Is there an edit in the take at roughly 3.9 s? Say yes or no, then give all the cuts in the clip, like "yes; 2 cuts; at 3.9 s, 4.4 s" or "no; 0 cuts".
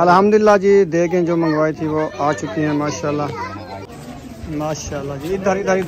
yes; 1 cut; at 3.9 s